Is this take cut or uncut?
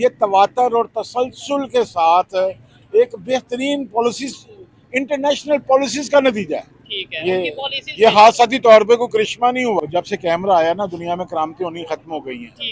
cut